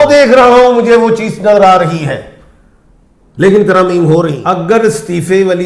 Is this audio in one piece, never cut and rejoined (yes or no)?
no